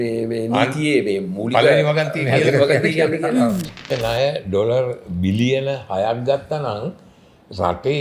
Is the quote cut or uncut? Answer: cut